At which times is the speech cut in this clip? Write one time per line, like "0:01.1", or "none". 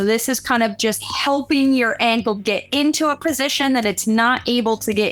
none

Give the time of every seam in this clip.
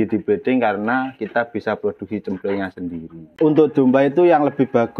0:03.2

